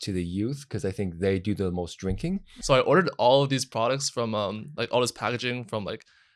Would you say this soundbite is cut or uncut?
cut